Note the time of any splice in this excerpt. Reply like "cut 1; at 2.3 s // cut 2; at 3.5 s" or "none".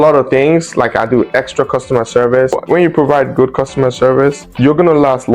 cut 1; at 2.5 s